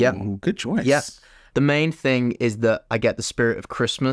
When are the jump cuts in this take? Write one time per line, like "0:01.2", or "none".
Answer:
0:01.3

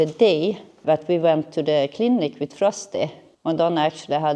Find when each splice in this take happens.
0:00.8
0:03.3

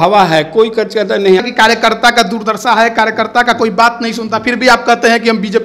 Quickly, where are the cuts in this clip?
0:01.4

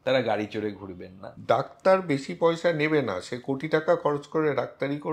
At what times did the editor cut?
0:01.3

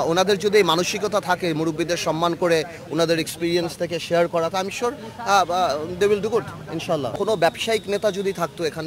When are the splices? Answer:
0:07.1

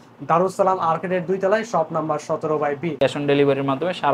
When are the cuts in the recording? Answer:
0:03.0

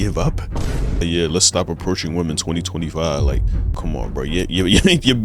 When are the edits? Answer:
0:01.0
0:03.7

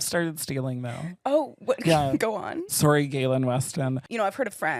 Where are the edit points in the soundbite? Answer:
none

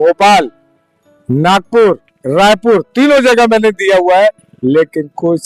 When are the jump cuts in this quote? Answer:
none

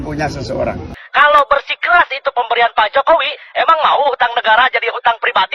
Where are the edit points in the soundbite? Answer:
0:01.0

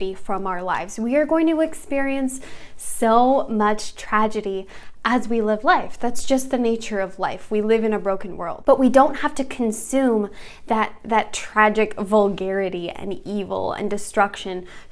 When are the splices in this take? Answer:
0:08.8

